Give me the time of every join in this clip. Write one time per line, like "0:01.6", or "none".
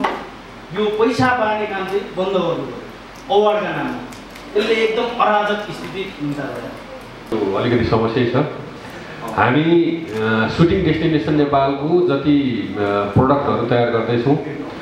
0:07.3